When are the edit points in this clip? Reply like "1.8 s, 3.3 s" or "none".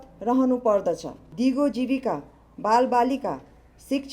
1.2 s